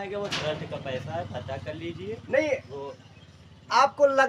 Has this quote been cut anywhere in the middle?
no; 0 cuts

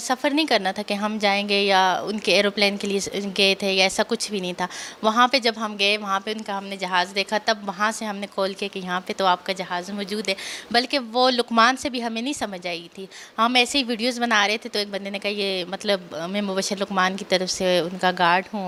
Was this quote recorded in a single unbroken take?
yes; 0 cuts

